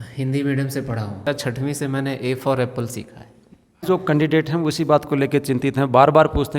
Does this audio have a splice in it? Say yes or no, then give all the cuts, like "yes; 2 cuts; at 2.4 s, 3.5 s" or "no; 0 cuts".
yes; 2 cuts; at 1.2 s, 3.9 s